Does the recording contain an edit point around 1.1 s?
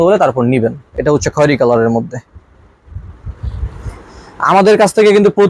no; 0 cuts

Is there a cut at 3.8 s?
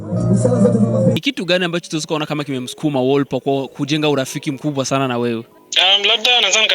no; 2 cuts; at 1.2 s, 5.6 s

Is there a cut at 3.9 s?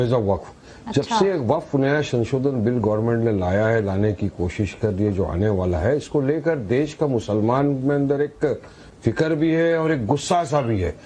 no; 0 cuts

